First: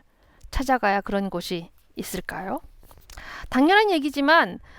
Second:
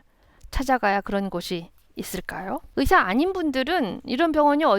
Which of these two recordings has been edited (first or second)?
second